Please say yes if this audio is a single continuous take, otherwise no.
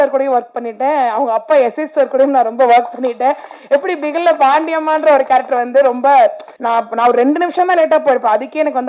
no